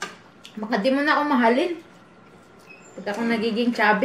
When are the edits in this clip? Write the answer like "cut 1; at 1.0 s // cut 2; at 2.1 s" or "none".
none